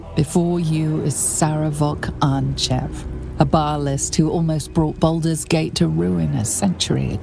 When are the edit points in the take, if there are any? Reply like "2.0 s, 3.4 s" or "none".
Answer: none

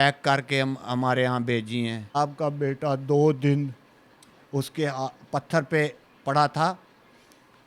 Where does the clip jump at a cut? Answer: 2.1 s

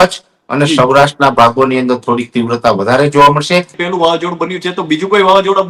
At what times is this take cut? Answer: 3.8 s

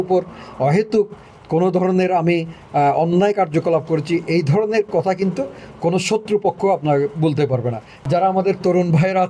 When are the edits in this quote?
7.9 s

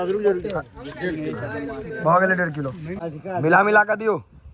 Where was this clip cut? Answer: 2.9 s

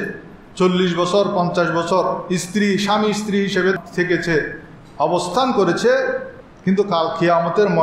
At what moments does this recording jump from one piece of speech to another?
3.8 s

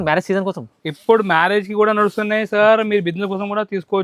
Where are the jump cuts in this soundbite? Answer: none

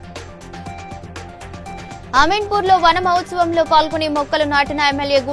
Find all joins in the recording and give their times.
1.2 s

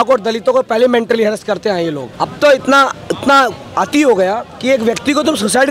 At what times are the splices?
2.1 s, 3.6 s, 4.5 s

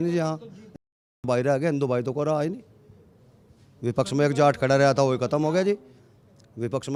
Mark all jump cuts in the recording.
none

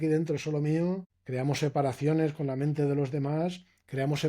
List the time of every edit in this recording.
1.2 s

